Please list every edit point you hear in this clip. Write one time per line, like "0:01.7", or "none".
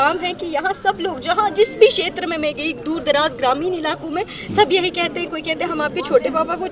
none